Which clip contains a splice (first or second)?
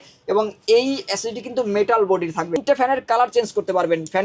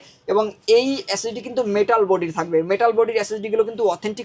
first